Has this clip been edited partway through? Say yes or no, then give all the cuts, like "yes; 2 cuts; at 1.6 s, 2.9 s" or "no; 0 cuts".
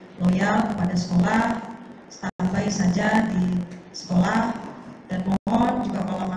no; 0 cuts